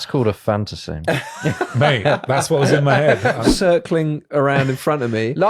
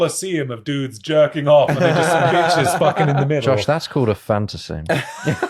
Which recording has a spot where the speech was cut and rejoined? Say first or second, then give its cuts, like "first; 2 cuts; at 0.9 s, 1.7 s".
first; 1 cut; at 3.4 s